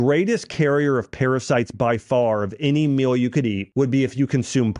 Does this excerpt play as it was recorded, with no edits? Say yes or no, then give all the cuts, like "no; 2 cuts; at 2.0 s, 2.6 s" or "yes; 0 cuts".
no; 1 cut; at 3.6 s